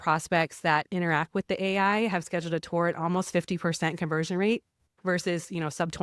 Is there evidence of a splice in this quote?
no; 0 cuts

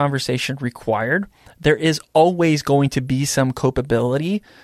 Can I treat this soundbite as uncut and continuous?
yes; 0 cuts

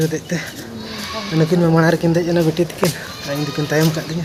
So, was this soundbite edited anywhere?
no; 0 cuts

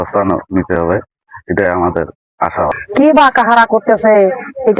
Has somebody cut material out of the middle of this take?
yes; 1 cut; at 2.7 s

